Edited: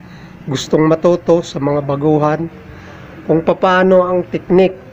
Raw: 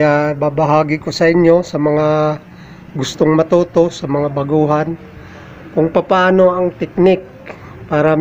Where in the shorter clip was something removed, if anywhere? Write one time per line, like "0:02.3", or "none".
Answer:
none

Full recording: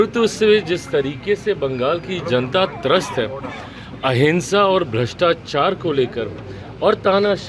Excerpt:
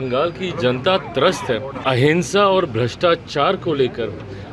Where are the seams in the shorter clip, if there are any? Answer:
0:01.7

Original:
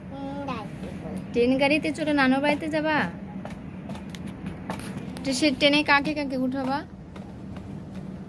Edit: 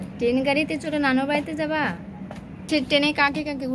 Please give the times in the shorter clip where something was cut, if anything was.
0:02.7

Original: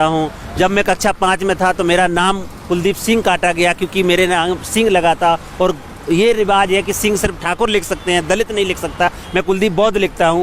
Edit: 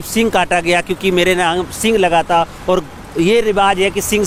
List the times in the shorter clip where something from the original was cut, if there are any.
none

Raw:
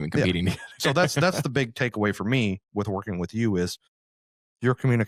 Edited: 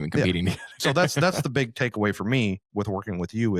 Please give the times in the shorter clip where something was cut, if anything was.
none

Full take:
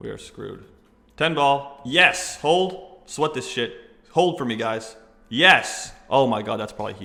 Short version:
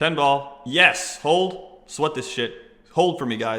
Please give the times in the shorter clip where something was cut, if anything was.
none

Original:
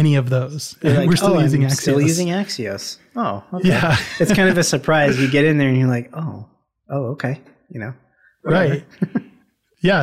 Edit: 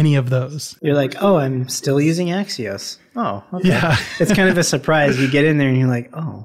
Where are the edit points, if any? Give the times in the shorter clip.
none

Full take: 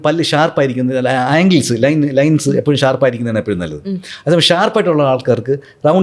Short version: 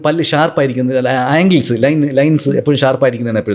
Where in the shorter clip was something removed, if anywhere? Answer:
none

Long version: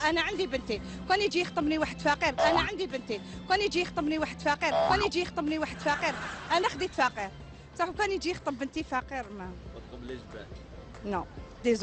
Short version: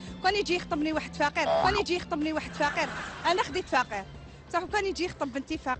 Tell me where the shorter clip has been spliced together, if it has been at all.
0:01.4

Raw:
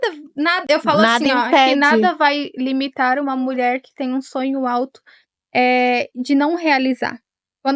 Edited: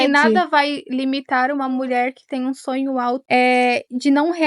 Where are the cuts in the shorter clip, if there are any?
0:03.2

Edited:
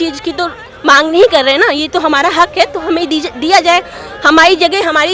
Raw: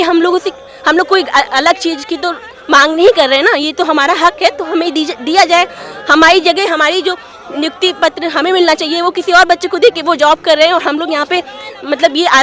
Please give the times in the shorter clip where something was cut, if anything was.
none

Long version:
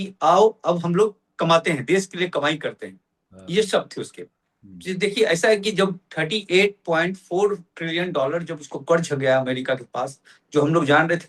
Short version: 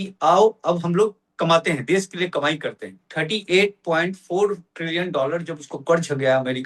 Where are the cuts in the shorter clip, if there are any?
0:03.1

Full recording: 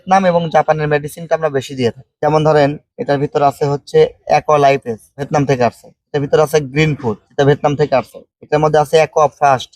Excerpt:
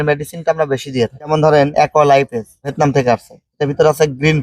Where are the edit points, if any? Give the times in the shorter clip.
0:01.5

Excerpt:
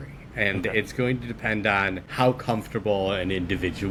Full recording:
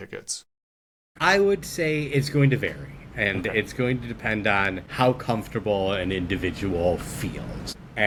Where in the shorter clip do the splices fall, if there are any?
none

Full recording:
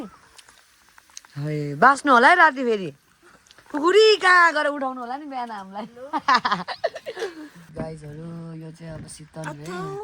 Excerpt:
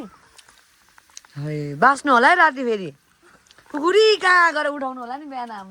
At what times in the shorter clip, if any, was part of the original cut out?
none

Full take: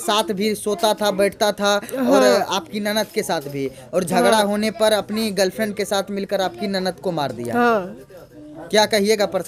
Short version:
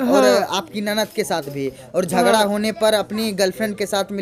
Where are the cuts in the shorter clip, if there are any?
none

